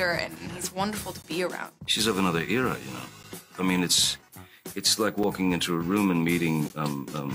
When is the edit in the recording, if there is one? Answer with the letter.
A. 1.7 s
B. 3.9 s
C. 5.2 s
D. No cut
A